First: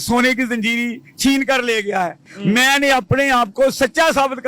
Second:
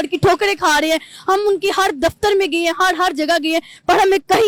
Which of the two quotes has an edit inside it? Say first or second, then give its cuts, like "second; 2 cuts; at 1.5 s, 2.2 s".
first; 1 cut; at 2.2 s